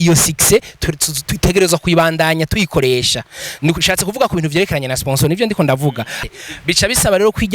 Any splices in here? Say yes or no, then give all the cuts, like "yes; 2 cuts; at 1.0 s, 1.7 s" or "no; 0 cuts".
yes; 1 cut; at 6.2 s